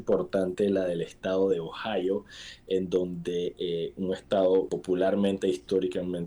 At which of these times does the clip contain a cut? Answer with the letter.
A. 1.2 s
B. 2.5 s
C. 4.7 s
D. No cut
C